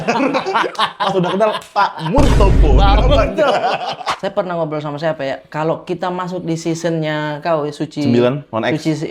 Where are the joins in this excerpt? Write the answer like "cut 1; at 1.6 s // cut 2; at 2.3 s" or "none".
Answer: cut 1; at 4.1 s